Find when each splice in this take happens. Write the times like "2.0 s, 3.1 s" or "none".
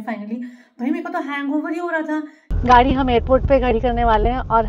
2.4 s